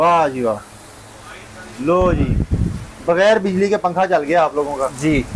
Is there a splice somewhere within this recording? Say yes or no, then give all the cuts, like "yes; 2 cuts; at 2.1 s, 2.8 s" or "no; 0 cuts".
no; 0 cuts